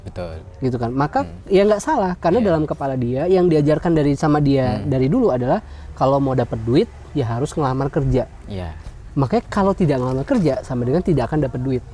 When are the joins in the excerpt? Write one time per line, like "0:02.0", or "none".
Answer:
none

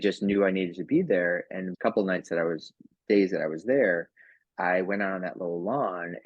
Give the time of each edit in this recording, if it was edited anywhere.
0:01.6

